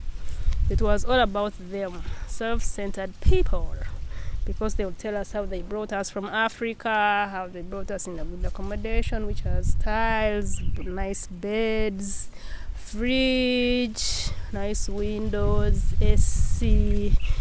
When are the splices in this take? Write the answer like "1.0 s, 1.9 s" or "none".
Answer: none